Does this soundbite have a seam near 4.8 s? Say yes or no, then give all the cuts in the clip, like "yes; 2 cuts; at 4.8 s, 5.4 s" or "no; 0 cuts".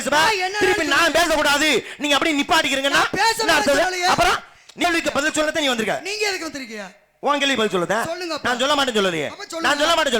yes; 1 cut; at 4.8 s